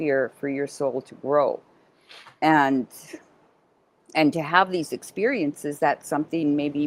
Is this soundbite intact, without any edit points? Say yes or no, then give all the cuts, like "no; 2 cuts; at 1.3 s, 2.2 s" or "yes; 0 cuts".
yes; 0 cuts